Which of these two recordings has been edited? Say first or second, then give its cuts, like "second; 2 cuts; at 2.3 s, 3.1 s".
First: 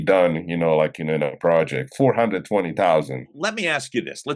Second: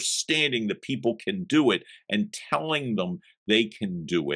first; 1 cut; at 3.4 s